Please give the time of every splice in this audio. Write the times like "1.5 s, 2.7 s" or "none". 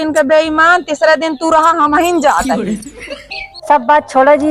3.1 s